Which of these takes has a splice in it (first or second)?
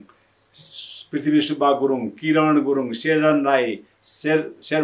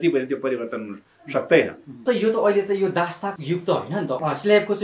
second